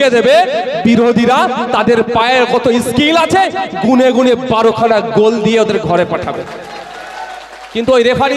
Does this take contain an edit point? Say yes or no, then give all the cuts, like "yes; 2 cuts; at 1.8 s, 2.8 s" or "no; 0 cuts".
no; 0 cuts